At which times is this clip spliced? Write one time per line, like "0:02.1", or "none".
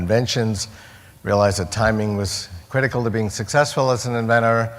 none